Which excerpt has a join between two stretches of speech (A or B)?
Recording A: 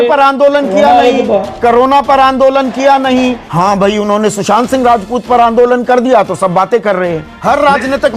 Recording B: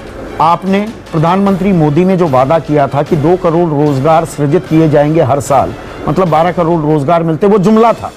A